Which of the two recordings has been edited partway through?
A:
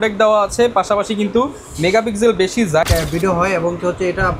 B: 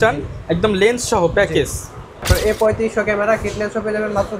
A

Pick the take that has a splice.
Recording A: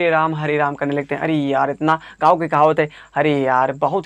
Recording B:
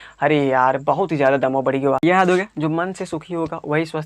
B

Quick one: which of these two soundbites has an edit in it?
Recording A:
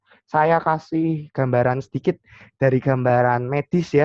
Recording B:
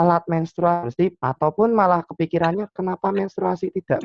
B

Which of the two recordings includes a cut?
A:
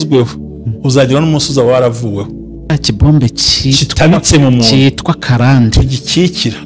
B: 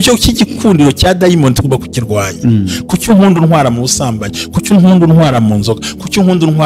A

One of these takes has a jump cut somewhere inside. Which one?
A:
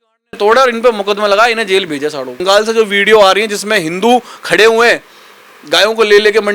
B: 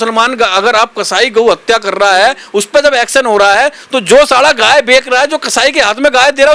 A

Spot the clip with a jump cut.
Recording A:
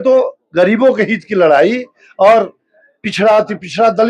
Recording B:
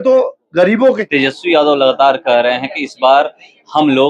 B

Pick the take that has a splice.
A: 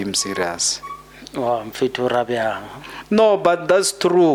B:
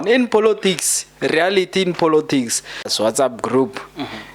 B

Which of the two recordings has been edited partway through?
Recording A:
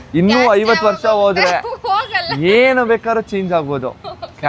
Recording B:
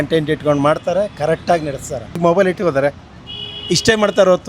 B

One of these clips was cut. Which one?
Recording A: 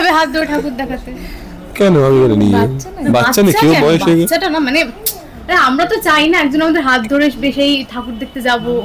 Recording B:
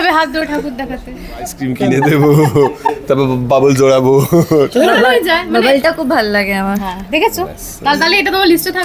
B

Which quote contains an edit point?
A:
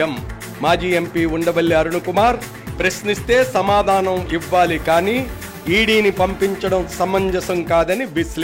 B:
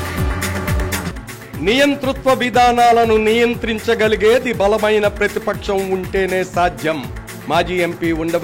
B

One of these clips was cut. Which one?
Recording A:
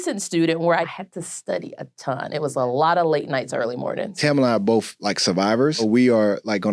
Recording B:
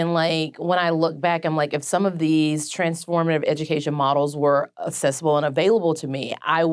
A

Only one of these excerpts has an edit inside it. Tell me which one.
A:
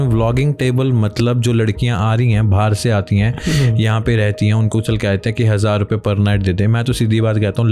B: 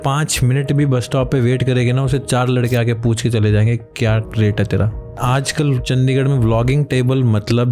B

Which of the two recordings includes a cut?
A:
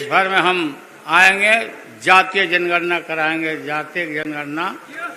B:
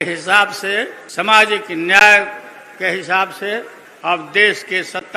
B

